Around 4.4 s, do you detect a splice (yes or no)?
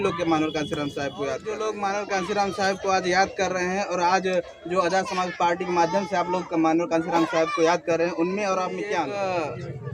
no